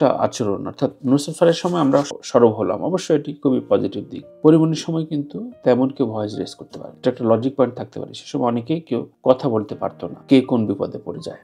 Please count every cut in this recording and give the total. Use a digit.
1